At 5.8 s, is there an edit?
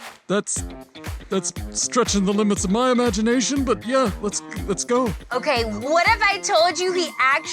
yes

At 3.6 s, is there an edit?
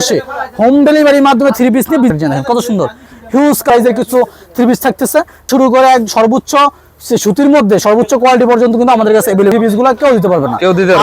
yes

